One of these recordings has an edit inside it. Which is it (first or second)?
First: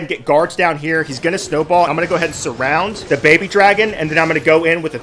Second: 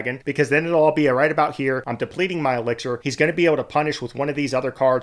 second